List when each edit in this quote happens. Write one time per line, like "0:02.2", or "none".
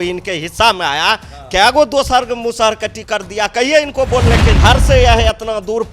0:04.5

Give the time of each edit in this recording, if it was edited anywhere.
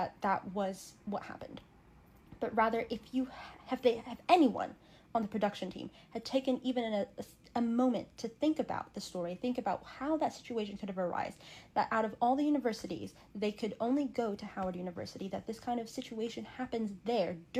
none

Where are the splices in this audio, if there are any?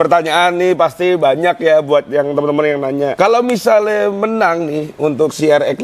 0:03.1

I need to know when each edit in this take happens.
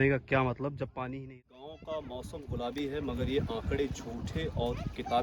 0:01.8

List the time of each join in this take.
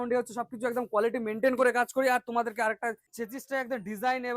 0:03.1

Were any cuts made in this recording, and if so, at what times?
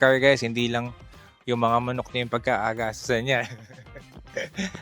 0:03.9

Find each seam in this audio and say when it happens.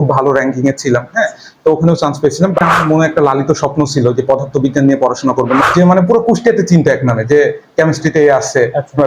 0:02.7
0:05.6

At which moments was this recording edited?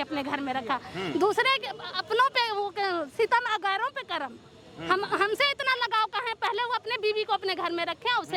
none

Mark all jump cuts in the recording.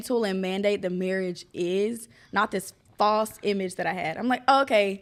none

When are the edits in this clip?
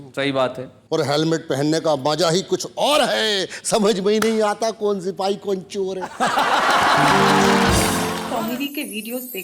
0:08.1

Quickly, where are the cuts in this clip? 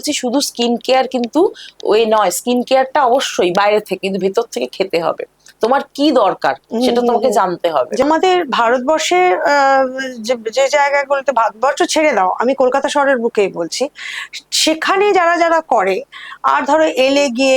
0:08.0

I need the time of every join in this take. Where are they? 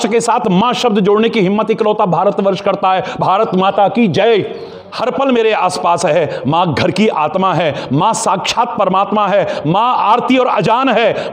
0:04.9

